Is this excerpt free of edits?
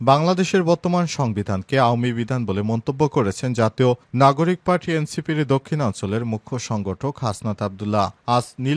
yes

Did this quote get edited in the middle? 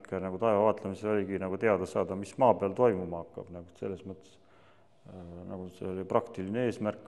no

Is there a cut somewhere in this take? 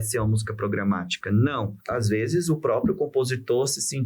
yes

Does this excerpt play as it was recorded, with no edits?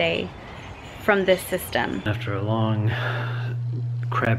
no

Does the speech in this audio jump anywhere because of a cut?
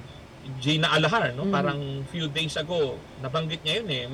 no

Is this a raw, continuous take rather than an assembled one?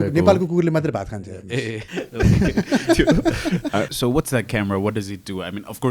no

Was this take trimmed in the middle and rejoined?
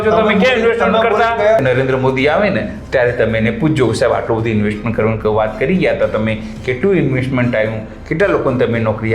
yes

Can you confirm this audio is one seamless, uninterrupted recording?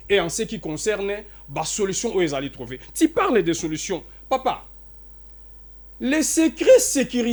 yes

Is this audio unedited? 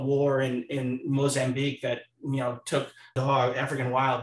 no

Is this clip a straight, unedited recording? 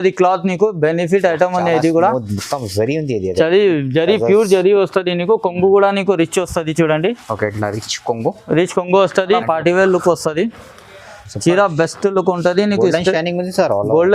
no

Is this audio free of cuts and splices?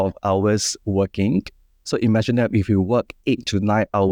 yes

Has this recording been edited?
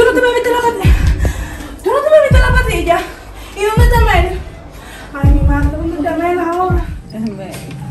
yes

